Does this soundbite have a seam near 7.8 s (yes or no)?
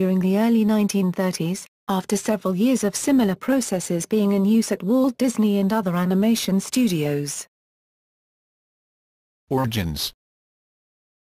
no